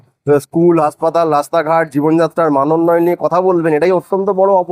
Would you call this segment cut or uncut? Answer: uncut